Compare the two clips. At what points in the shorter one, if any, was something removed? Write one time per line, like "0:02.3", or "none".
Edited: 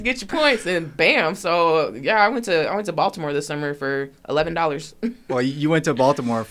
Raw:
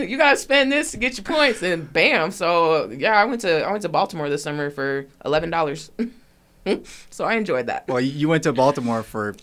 0:05.2